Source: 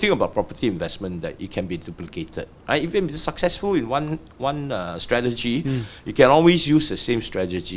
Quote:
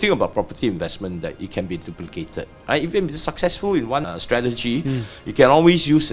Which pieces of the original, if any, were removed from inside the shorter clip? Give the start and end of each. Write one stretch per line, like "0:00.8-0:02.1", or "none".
0:04.1-0:04.9